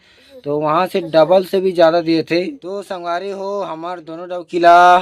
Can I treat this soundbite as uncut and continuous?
no; 1 cut; at 2.6 s

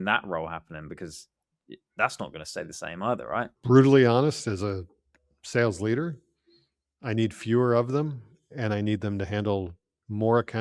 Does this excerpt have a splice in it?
yes; 1 cut; at 3.6 s

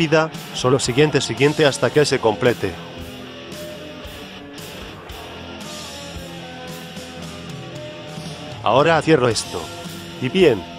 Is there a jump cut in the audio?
yes; 1 cut; at 6.1 s

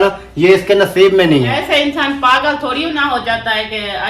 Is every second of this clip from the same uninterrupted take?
no; 1 cut; at 1.6 s

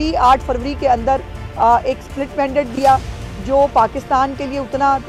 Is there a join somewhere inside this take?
no; 0 cuts

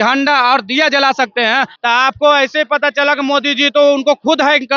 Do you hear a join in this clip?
yes; 1 cut; at 1.7 s

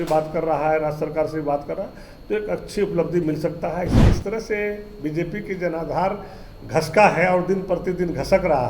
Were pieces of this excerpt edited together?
yes; 1 cut; at 3.9 s

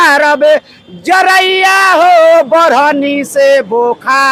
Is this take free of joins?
yes; 0 cuts

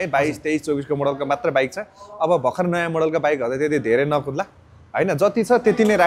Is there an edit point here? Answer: no; 0 cuts

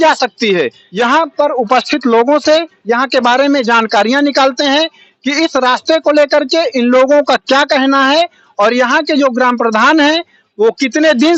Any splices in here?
no; 0 cuts

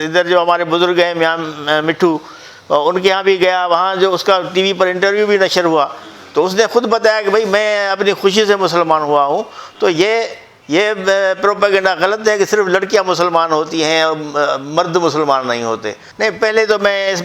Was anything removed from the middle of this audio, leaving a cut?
yes; 1 cut; at 16.0 s

